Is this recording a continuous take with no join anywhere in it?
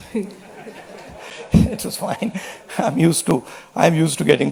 yes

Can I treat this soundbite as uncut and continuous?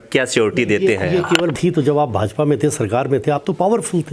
no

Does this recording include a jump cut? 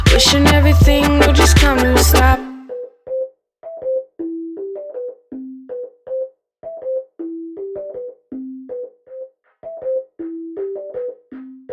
no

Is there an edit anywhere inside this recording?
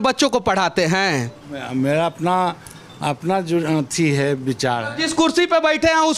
yes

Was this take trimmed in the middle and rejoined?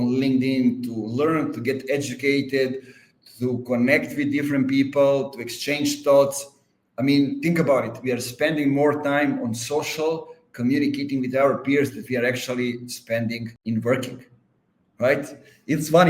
yes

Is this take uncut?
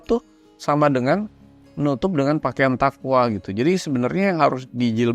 yes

